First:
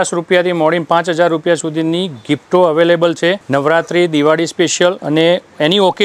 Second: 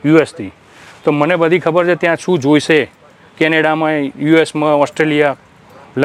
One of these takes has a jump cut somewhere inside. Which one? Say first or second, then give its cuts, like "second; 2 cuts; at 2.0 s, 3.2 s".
first; 2 cuts; at 3.4 s, 5.0 s